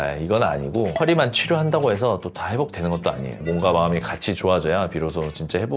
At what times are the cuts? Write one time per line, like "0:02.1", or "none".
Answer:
0:03.4